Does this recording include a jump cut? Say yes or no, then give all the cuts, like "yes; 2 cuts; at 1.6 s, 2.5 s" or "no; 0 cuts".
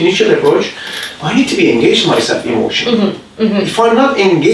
no; 0 cuts